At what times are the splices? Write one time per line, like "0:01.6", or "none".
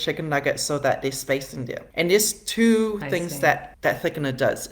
0:01.8